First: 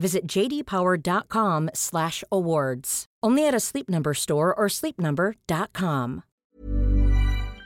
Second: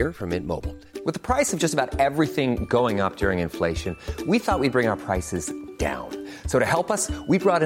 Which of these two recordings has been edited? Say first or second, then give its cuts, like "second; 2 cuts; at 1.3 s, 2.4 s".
first; 1 cut; at 6.3 s